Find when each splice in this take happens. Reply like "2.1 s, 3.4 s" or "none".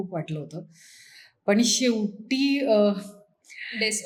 none